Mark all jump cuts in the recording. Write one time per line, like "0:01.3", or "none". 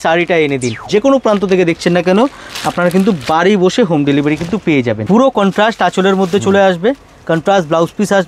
0:00.8
0:05.0